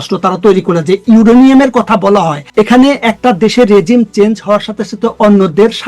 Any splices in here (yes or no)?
yes